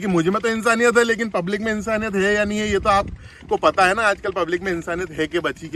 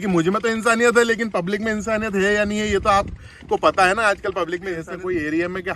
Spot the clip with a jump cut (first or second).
second